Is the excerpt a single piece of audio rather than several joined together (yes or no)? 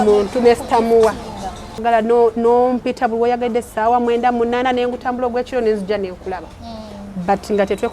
no